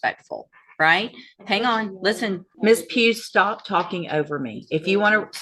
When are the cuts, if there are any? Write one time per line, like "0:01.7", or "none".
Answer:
0:02.5